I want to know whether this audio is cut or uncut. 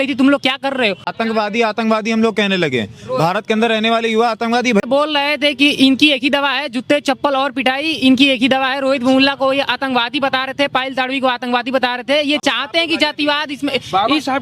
cut